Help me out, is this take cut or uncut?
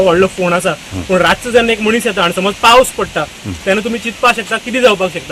uncut